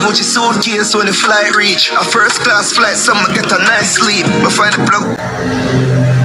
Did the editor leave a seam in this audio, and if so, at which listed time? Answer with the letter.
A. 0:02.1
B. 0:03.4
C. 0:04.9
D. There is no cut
D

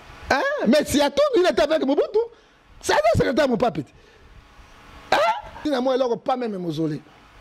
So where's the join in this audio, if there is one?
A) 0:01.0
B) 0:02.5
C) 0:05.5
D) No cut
C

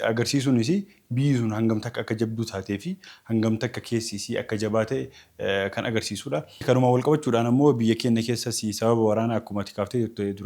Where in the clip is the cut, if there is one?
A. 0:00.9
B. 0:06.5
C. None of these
C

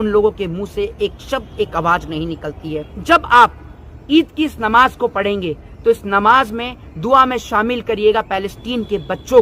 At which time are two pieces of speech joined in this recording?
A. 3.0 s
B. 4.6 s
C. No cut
A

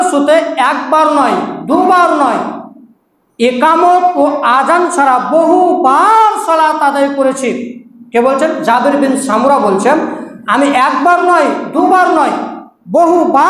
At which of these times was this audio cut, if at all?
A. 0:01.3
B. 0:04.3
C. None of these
C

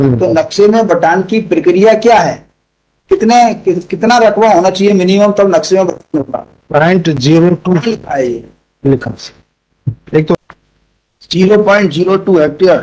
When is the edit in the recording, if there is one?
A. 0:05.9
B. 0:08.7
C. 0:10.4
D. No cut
C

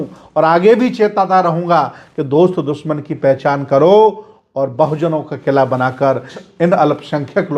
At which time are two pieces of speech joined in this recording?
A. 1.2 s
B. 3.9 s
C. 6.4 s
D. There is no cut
C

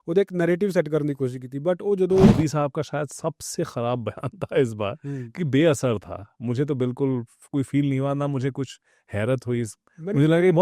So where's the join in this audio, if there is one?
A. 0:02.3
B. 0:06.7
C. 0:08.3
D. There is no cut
A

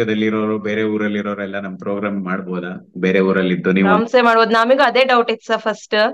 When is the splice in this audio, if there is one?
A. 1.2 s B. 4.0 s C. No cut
B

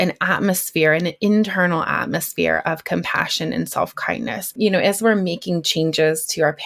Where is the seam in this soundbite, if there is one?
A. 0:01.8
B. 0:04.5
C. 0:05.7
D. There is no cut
B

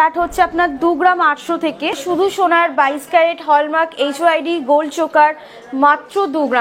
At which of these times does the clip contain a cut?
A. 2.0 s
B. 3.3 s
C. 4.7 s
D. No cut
A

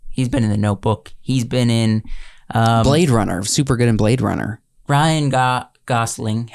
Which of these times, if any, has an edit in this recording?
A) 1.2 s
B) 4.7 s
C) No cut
B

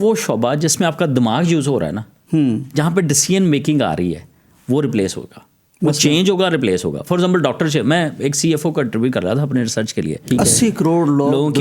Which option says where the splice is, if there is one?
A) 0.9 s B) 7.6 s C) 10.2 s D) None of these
C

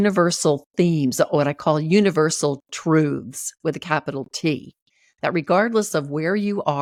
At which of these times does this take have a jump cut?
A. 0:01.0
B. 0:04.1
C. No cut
C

